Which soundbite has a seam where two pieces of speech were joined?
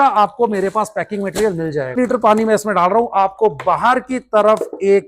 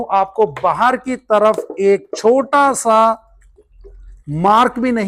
first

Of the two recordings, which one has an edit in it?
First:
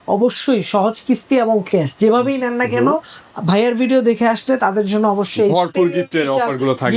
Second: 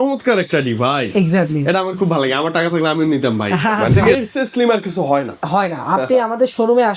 second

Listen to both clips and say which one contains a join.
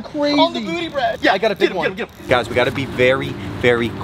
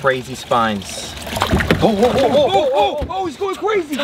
first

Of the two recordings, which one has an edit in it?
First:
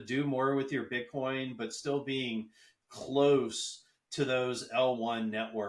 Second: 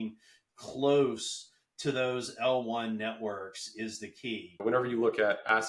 second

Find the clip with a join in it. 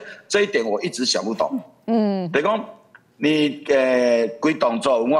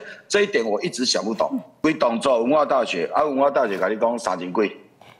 second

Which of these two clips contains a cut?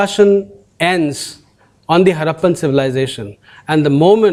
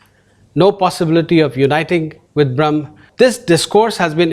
second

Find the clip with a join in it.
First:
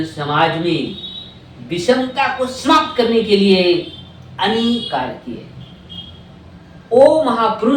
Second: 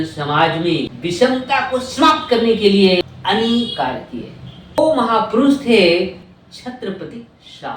second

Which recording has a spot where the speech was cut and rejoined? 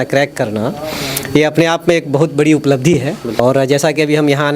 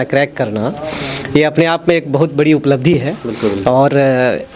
first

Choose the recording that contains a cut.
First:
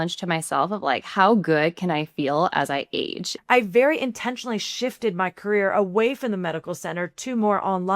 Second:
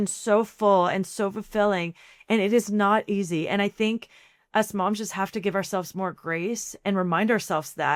first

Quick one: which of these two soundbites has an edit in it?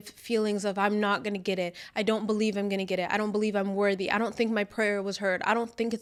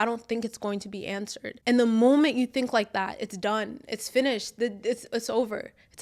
second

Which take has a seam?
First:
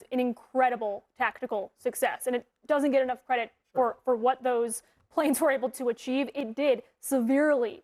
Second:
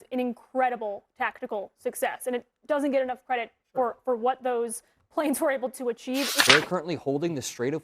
second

